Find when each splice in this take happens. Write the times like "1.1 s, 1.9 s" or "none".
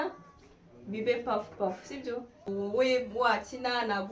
2.5 s